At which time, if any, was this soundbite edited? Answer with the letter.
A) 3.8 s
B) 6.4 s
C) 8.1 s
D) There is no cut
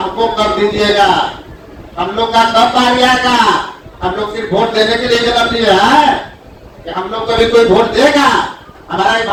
D